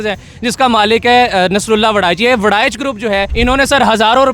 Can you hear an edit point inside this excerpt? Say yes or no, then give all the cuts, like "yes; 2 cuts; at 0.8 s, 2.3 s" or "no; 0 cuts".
yes; 1 cut; at 3.3 s